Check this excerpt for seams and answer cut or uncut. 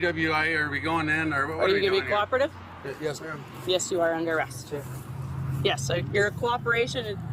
uncut